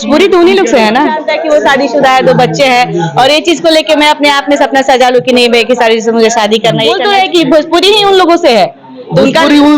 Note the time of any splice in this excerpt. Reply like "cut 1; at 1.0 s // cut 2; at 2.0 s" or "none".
cut 1; at 1.3 s // cut 2; at 7.0 s